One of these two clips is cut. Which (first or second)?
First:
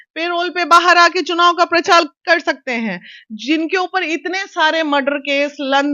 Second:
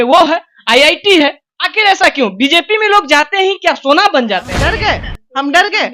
second